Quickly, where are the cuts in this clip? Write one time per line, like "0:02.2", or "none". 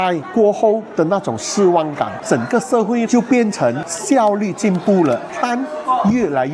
0:02.2
0:03.9
0:05.3